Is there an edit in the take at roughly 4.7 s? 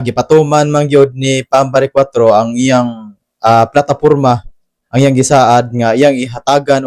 no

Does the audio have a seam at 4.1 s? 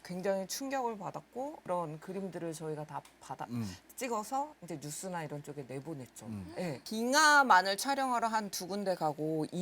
no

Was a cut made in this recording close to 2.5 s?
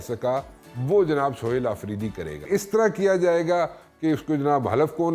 yes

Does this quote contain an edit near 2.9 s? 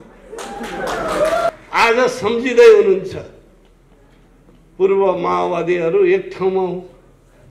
no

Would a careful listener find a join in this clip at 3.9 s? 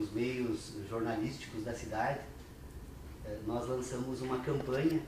yes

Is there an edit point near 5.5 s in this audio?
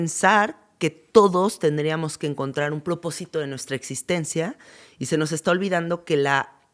no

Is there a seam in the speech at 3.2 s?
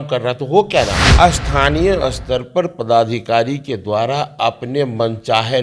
no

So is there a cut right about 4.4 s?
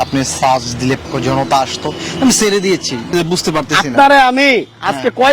no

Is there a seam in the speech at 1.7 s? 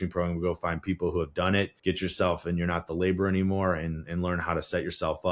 yes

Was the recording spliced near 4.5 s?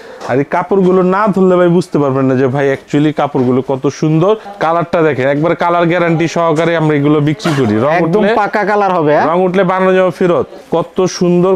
yes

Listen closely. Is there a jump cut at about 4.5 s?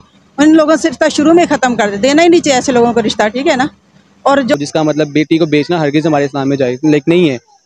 yes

